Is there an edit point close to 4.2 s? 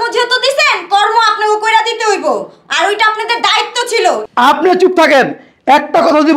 yes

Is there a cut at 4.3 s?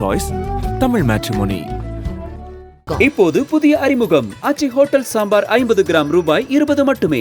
no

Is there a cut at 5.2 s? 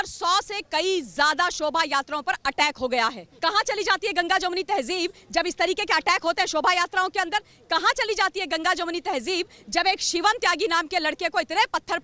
no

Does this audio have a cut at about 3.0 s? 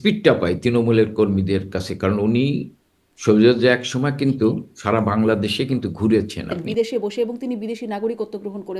no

